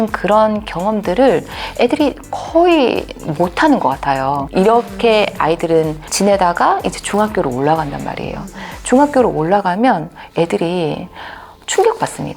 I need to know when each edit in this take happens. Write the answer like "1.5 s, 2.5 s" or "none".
4.5 s, 6.0 s